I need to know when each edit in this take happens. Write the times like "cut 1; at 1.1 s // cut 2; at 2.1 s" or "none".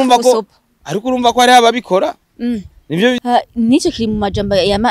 cut 1; at 3.2 s